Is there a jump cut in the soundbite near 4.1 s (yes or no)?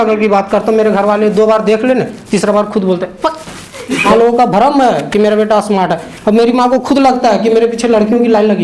yes